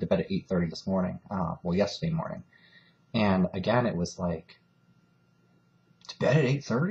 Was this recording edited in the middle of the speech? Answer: yes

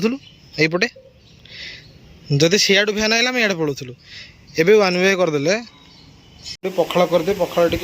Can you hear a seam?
yes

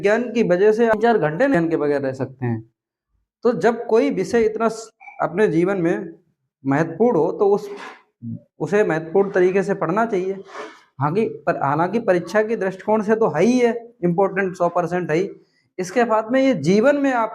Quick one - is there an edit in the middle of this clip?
yes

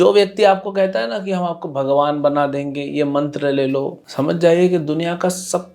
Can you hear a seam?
yes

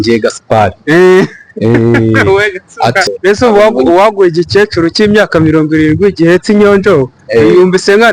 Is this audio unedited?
no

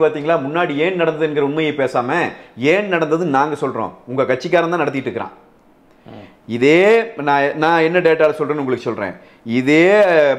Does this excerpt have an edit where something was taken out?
no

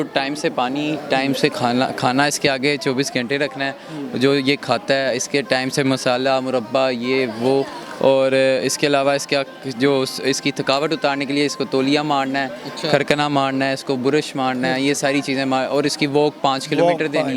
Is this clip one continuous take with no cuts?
yes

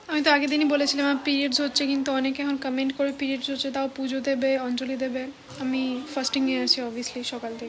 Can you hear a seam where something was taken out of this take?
no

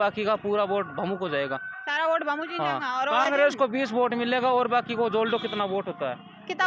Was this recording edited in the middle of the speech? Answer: no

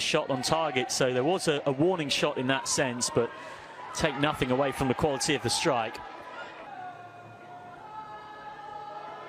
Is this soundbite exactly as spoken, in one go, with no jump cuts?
no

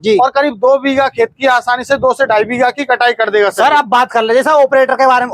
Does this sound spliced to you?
no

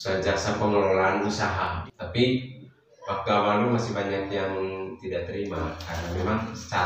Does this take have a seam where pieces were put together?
yes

